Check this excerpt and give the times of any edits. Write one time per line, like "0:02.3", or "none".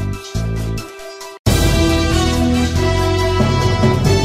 0:01.4